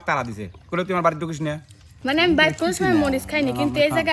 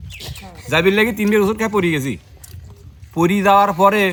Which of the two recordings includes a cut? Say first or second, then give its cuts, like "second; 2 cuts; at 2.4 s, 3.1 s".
first; 1 cut; at 1.9 s